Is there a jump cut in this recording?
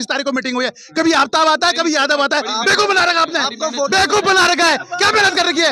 no; 0 cuts

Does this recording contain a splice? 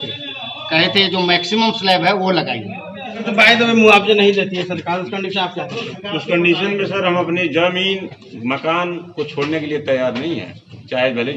yes; 1 cut; at 3.2 s

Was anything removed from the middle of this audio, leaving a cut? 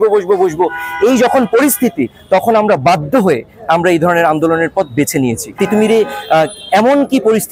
yes; 1 cut; at 5.6 s

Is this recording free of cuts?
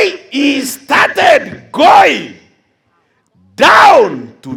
yes; 0 cuts

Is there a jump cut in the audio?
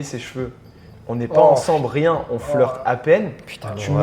no; 0 cuts

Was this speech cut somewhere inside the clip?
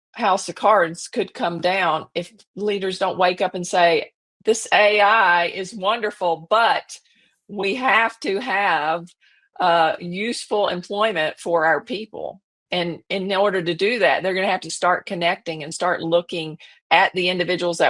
no; 0 cuts

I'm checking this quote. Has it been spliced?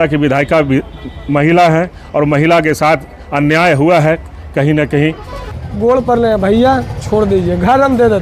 yes; 1 cut; at 5.6 s

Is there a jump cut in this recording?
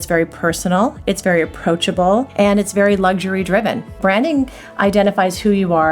yes; 2 cuts; at 2.3 s, 4.0 s

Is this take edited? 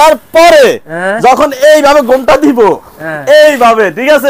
no; 0 cuts

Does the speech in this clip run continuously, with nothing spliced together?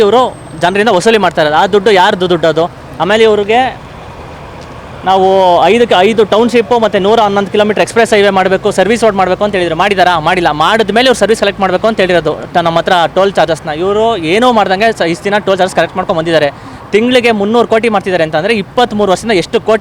yes; 0 cuts

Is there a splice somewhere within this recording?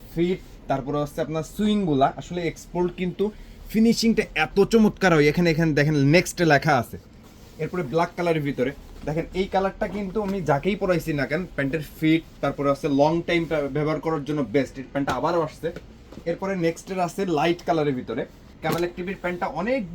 yes; 1 cut; at 18.4 s

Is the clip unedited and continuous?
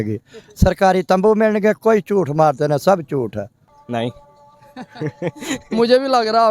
no; 1 cut; at 3.6 s

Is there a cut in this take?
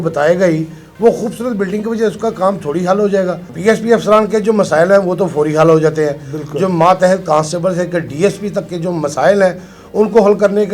yes; 1 cut; at 3.5 s

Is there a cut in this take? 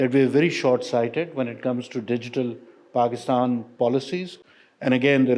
no; 0 cuts

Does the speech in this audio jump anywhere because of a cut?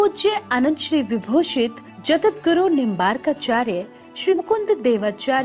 yes; 1 cut; at 4.3 s

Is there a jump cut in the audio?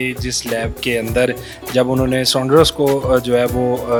no; 0 cuts

